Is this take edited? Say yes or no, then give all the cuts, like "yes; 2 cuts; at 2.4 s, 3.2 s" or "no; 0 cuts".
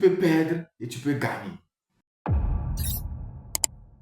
yes; 1 cut; at 2.1 s